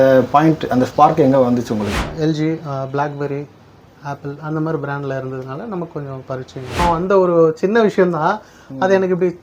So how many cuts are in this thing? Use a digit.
2